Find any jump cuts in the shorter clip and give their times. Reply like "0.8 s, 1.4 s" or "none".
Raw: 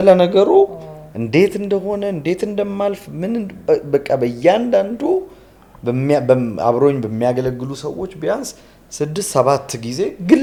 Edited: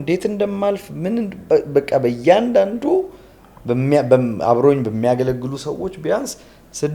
none